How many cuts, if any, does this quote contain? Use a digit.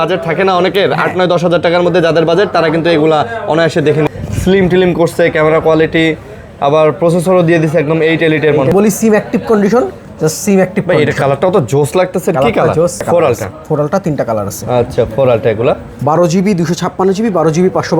3